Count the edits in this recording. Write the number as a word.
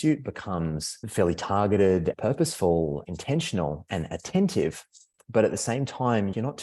three